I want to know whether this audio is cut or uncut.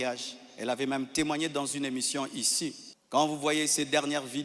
cut